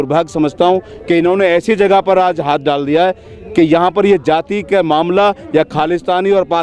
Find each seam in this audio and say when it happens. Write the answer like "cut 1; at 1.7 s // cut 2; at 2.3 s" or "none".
none